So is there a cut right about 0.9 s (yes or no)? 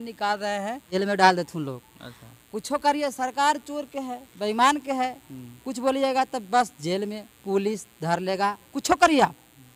yes